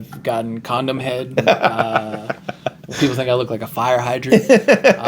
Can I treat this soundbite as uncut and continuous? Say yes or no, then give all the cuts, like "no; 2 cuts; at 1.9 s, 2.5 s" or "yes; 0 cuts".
no; 3 cuts; at 1.3 s, 2.9 s, 4.2 s